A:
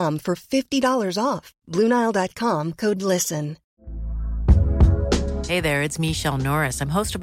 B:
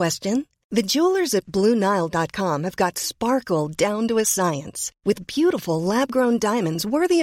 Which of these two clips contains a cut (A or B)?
A